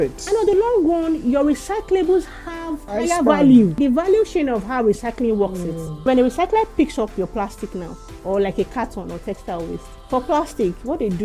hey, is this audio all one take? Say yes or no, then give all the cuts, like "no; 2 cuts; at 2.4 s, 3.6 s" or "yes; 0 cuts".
no; 4 cuts; at 2.9 s, 3.8 s, 6.0 s, 9.9 s